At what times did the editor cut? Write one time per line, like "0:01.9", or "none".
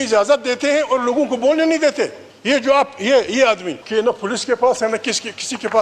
0:02.3
0:03.8